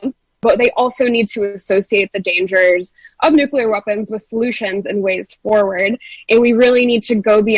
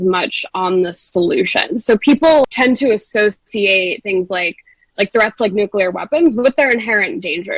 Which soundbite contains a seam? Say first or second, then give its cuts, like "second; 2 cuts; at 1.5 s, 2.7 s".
second; 1 cut; at 2.5 s